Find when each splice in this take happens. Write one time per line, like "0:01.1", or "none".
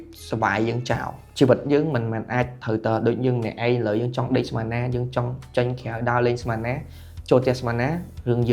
none